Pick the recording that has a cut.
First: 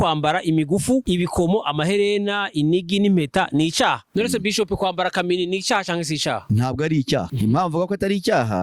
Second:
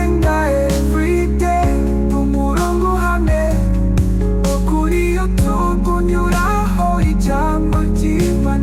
first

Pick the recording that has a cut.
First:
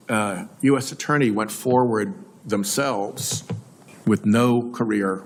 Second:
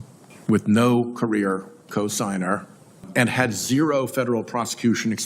second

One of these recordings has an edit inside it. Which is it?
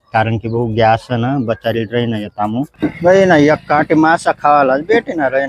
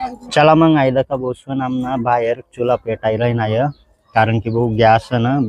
first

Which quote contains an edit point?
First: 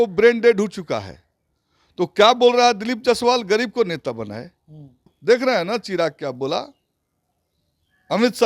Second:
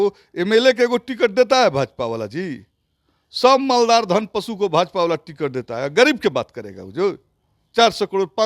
first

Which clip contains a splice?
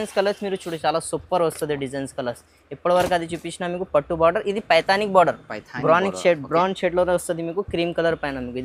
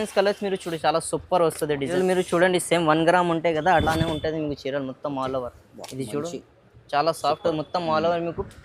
second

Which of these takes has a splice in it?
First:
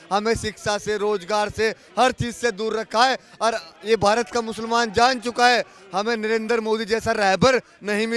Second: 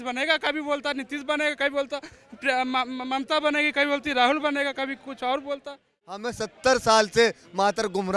second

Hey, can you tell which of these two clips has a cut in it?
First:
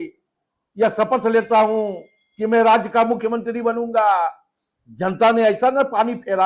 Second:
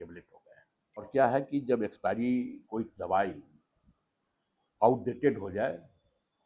second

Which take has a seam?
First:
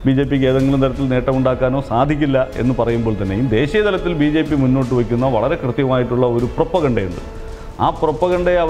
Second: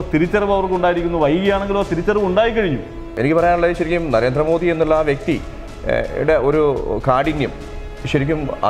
second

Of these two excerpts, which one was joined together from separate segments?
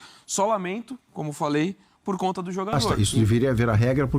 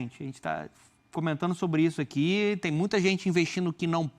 first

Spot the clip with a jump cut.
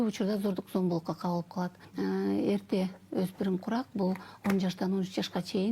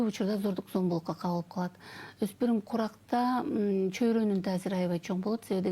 first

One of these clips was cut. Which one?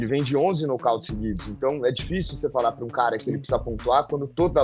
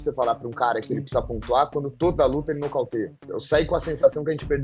second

